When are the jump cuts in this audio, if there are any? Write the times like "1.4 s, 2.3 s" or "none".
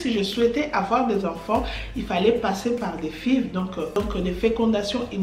none